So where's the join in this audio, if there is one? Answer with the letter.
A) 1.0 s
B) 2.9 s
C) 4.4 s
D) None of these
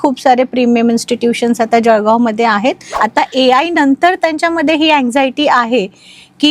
B